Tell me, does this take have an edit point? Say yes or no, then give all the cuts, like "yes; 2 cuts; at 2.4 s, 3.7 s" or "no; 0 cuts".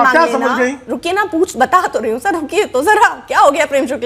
no; 0 cuts